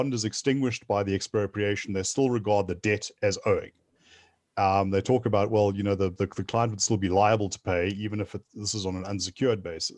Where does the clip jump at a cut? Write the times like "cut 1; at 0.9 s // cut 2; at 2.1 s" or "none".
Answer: none